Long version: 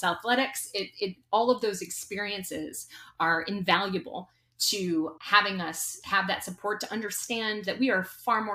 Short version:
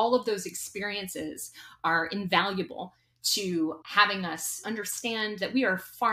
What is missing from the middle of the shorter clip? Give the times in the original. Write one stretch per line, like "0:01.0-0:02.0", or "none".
0:05.9-0:06.8